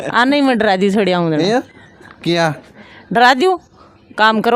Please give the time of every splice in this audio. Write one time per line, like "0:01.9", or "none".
none